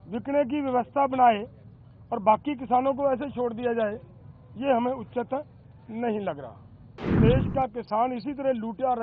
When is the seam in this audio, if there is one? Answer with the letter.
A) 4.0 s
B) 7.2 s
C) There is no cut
B